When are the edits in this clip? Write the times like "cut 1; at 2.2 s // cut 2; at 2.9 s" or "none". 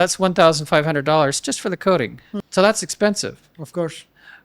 cut 1; at 2.4 s